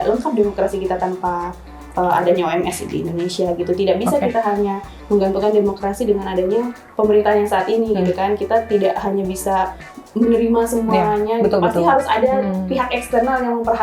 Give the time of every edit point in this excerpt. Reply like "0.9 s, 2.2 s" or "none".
none